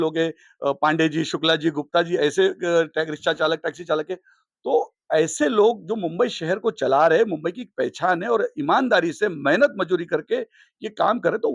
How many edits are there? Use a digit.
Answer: 0